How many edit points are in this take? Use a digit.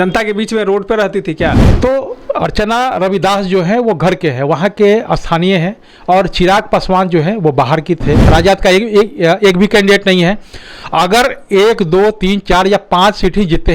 2